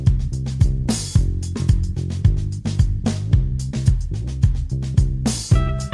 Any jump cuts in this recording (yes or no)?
no